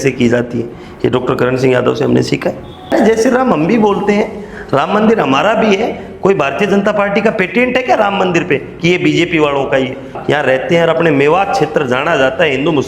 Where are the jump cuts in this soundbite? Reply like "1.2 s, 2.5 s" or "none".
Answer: 2.9 s, 10.1 s